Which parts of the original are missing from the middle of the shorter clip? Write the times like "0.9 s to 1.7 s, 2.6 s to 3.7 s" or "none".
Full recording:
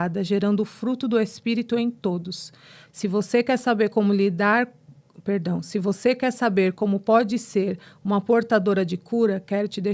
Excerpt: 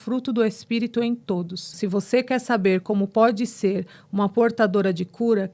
2.5 s to 5.6 s